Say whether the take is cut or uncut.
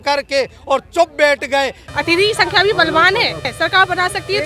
cut